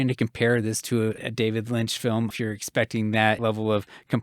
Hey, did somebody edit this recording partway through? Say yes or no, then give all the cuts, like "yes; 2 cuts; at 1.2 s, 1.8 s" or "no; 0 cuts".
yes; 3 cuts; at 1.2 s, 2.3 s, 3.4 s